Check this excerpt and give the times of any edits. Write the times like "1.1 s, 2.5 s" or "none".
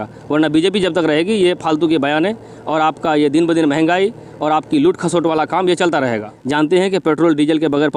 6.4 s